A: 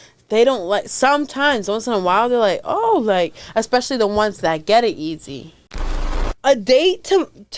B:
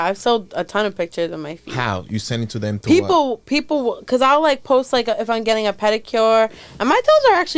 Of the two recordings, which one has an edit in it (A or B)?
A